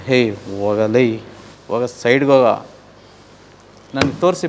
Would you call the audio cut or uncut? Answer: uncut